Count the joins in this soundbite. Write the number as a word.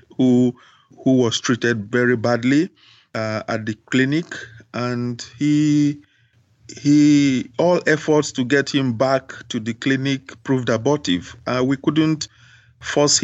zero